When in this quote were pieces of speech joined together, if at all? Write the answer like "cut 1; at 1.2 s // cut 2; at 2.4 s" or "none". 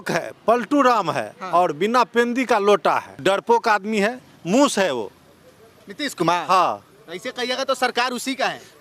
cut 1; at 3.2 s

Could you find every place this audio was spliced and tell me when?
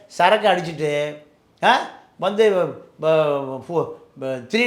none

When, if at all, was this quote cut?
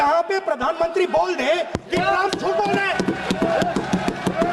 none

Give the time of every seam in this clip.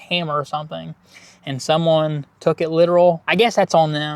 cut 1; at 3.2 s

